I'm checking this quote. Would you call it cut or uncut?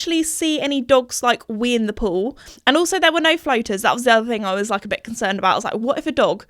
cut